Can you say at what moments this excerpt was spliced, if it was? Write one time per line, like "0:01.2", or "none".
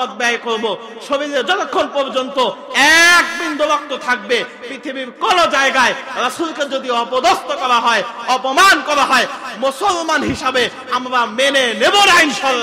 none